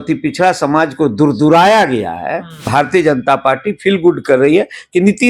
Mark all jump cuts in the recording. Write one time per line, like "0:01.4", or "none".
0:02.7